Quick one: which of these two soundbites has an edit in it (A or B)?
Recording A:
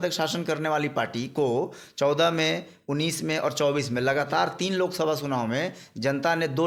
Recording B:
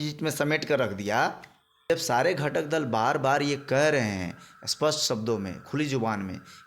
B